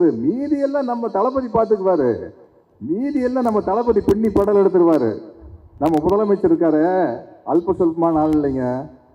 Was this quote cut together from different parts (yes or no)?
no